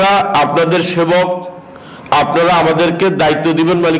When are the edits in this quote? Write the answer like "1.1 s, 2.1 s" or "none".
none